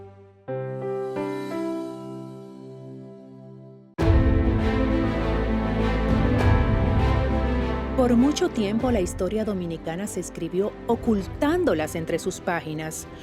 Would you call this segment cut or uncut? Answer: cut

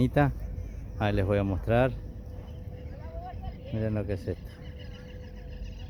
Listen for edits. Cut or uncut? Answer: uncut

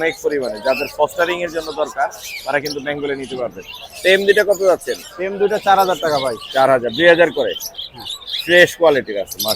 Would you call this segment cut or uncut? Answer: uncut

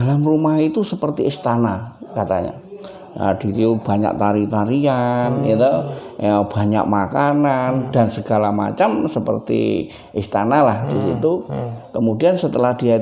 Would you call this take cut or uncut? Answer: uncut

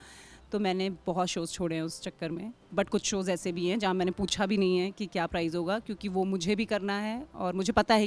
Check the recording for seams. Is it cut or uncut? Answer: uncut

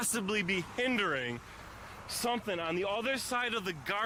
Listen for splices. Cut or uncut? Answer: uncut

